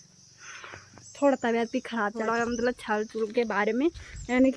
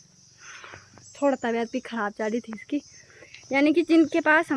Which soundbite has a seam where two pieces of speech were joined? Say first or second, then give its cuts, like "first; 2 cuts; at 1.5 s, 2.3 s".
first; 1 cut; at 2.2 s